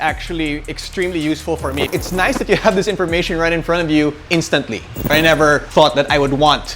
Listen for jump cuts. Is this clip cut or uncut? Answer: cut